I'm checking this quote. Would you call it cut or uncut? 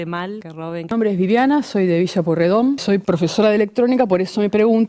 cut